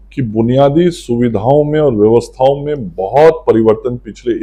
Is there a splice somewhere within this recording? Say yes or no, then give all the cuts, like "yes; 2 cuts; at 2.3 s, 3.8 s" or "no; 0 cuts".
no; 0 cuts